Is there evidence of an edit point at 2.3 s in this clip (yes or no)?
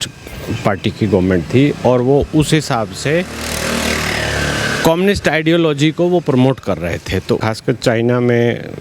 no